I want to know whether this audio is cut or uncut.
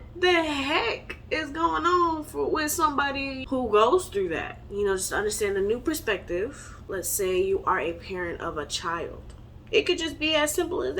cut